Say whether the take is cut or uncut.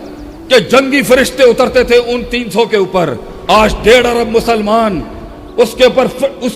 uncut